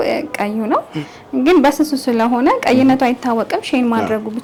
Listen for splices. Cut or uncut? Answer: uncut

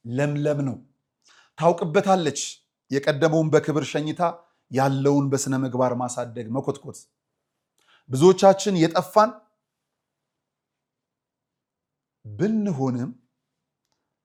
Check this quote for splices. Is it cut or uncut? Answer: uncut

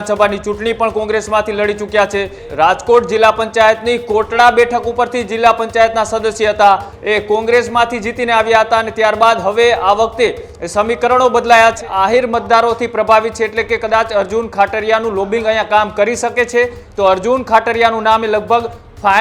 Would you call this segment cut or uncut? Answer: cut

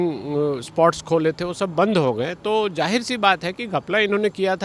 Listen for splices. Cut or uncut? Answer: uncut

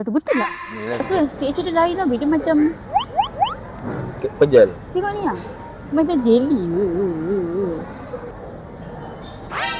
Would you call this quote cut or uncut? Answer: cut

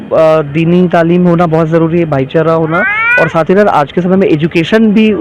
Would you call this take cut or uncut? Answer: uncut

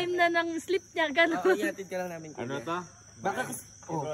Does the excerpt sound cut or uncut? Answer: uncut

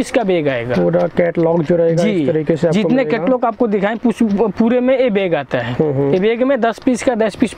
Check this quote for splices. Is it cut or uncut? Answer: uncut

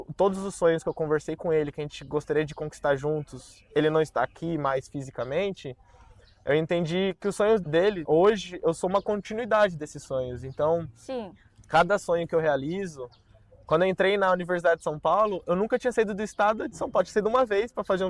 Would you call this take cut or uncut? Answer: cut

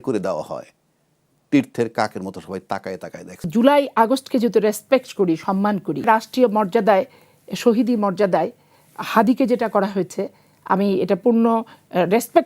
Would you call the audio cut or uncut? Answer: cut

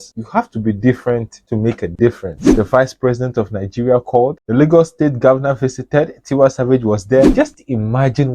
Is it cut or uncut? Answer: cut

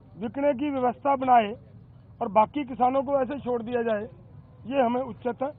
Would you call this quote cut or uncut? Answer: uncut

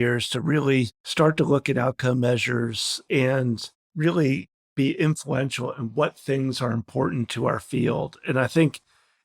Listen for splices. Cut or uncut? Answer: cut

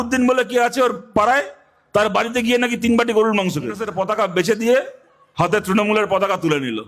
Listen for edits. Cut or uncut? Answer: cut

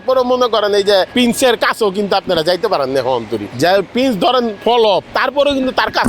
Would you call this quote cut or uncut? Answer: cut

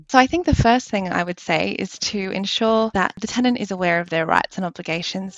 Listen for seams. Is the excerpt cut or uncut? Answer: cut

